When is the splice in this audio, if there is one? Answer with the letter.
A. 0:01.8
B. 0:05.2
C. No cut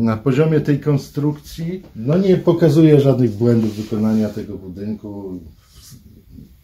A